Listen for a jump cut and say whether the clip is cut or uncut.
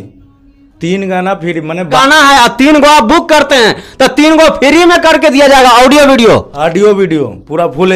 cut